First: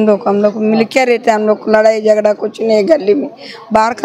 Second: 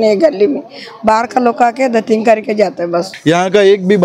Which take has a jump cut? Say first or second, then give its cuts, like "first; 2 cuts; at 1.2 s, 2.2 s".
second; 1 cut; at 3.1 s